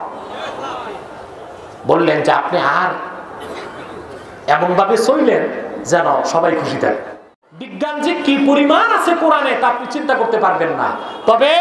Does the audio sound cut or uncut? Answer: cut